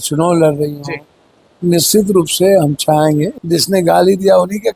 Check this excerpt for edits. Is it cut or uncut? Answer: cut